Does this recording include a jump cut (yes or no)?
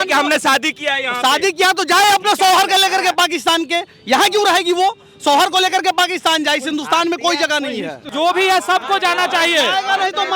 yes